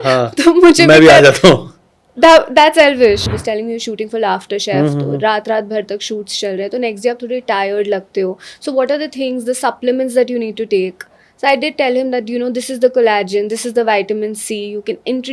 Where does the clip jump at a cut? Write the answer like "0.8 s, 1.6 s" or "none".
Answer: 3.2 s